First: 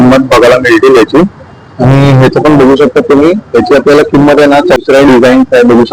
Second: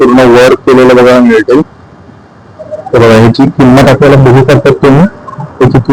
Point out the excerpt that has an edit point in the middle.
first; 1 cut; at 4.8 s

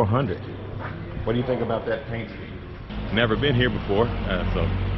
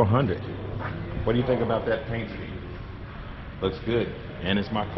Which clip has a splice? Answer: first; 1 cut; at 2.9 s

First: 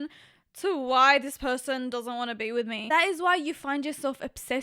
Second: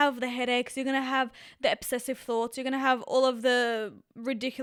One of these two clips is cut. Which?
first; 1 cut; at 2.8 s

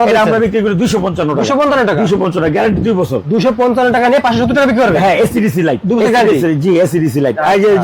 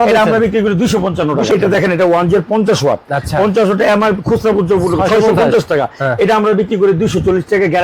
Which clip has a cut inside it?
second; 1 cut; at 1.5 s

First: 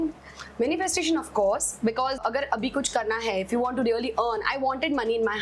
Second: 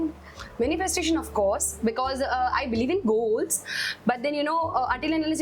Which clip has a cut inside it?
first; 1 cut; at 2.2 s

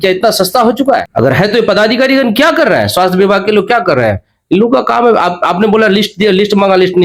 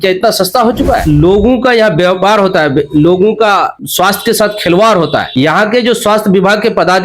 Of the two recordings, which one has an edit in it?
second; 1 cut; at 1.0 s

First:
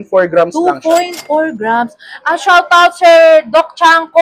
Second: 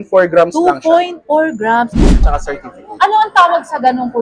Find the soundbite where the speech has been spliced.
second; 1 cut; at 2.2 s

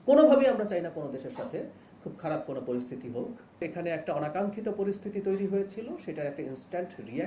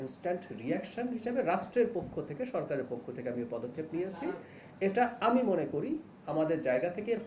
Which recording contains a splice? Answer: first; 1 cut; at 3.6 s

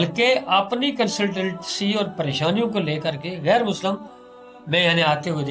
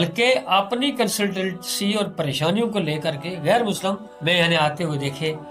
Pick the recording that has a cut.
second; 1 cut; at 4.1 s

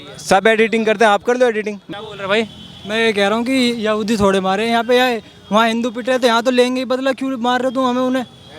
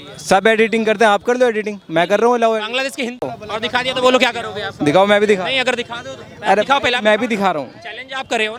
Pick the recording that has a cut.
first; 1 cut; at 1.8 s

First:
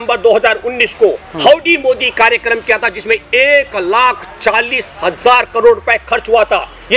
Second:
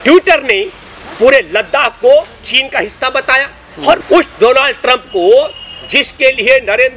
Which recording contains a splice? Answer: second; 1 cut; at 4.0 s

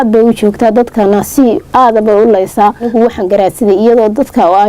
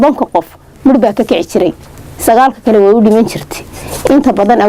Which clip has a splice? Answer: first; 1 cut; at 2.9 s

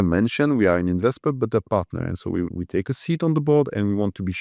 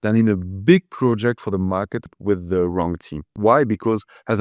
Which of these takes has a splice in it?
second; 2 cuts; at 2.1 s, 3.3 s

